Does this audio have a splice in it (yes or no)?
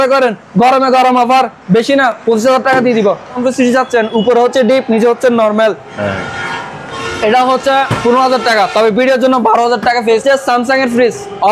yes